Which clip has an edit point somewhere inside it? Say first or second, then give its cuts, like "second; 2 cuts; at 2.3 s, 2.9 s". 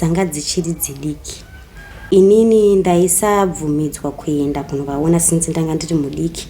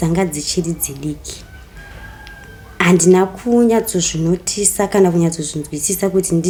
first; 1 cut; at 2.3 s